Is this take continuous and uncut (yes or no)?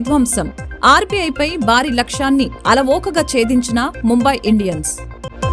yes